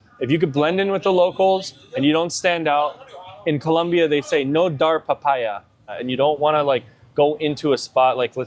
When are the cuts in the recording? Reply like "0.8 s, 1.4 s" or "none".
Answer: 6.0 s